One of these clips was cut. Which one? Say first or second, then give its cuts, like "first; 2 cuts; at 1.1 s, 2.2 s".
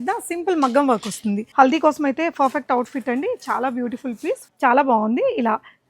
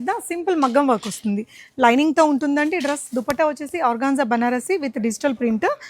first; 2 cuts; at 1.5 s, 4.5 s